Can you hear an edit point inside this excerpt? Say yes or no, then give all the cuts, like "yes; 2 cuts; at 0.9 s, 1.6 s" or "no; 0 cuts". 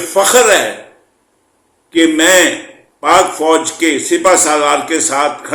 no; 0 cuts